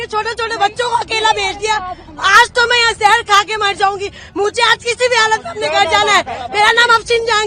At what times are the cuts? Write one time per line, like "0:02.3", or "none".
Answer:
none